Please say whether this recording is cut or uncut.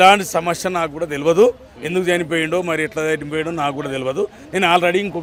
uncut